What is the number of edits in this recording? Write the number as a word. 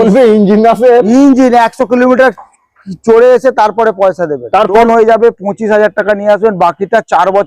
one